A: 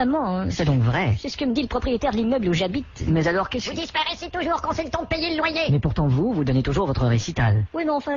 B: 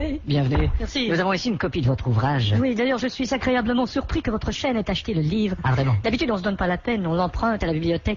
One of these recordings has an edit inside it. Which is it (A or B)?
B